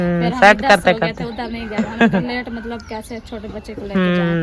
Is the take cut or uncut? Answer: uncut